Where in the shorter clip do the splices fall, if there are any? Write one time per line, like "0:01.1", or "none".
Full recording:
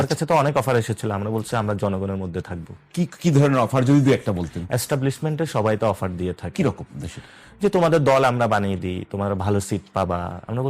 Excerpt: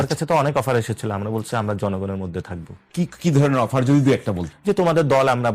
0:04.5